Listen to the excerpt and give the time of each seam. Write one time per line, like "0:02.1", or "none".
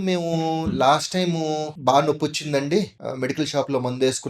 0:01.7
0:03.0